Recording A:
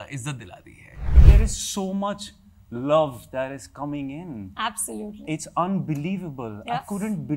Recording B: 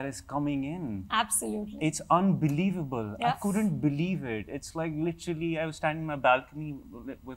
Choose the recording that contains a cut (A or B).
A